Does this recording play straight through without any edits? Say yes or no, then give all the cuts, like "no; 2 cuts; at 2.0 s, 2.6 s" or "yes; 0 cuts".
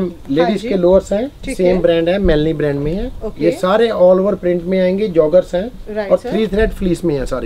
yes; 0 cuts